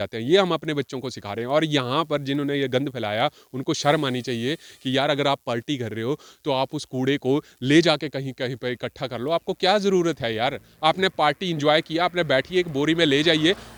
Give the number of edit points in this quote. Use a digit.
0